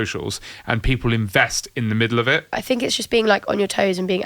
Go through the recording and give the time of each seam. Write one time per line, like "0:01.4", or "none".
0:02.6